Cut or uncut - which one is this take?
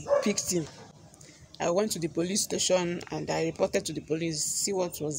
uncut